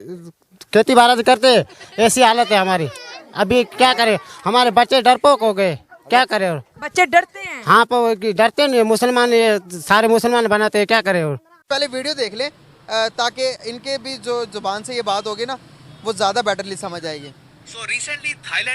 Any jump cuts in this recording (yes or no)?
yes